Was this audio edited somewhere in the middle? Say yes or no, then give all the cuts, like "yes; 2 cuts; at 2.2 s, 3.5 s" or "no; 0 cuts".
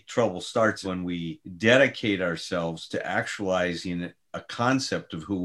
yes; 1 cut; at 0.9 s